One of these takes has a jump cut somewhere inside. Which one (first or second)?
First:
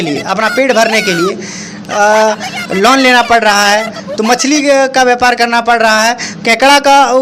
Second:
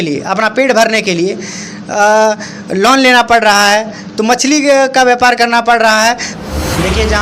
second